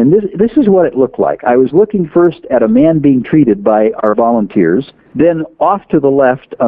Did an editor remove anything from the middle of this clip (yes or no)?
yes